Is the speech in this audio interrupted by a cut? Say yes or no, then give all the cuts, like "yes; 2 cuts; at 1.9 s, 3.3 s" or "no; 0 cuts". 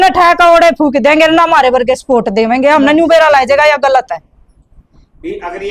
no; 0 cuts